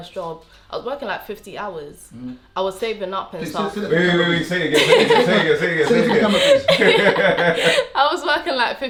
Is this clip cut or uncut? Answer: uncut